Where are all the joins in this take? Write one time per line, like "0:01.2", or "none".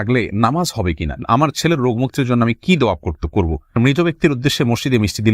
0:01.2
0:03.8

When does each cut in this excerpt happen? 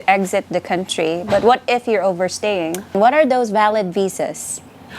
0:02.8

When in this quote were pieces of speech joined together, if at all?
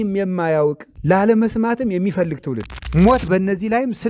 0:00.9
0:02.7

